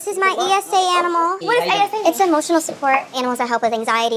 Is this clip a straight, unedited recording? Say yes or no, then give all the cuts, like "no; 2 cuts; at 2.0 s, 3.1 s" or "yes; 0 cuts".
yes; 0 cuts